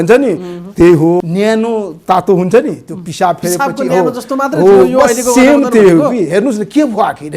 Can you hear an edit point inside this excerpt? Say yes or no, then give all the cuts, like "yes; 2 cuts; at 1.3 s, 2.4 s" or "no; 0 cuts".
yes; 1 cut; at 1.3 s